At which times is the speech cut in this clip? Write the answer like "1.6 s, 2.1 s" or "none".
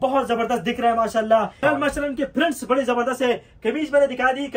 1.6 s